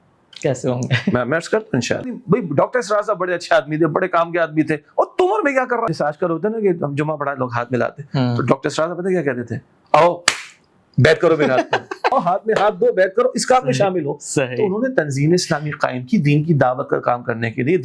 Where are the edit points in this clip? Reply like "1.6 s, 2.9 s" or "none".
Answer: 2.2 s, 5.9 s, 12.1 s